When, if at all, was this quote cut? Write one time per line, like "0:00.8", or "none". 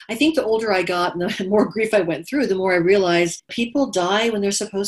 0:03.6